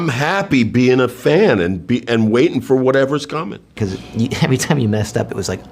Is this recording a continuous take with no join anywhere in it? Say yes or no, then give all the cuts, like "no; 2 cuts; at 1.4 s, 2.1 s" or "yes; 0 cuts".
no; 1 cut; at 3.8 s